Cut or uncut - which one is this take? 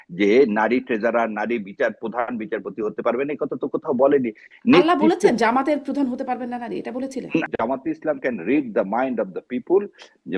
cut